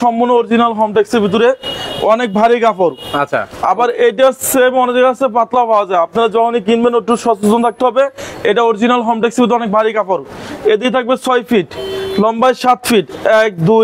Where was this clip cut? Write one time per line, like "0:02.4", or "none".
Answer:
none